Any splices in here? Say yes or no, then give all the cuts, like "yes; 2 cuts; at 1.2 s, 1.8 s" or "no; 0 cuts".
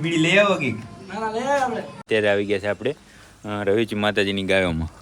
yes; 1 cut; at 2.0 s